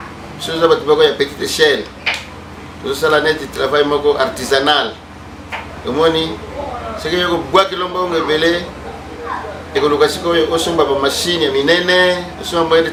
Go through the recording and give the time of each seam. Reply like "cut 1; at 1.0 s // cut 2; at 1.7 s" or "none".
none